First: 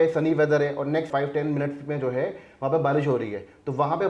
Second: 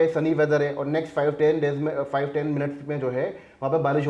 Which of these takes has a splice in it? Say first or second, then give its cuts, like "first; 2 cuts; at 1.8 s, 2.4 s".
first; 1 cut; at 1.1 s